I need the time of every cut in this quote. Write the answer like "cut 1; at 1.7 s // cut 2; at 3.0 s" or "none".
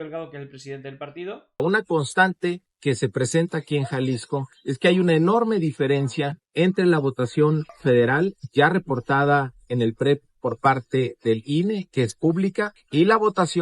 cut 1; at 1.6 s